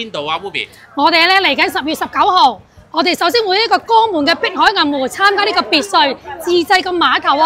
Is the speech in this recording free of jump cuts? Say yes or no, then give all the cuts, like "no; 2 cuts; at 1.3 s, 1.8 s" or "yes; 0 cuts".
yes; 0 cuts